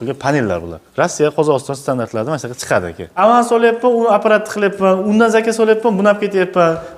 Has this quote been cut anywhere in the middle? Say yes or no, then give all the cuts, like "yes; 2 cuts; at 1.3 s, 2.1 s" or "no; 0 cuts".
yes; 1 cut; at 3.0 s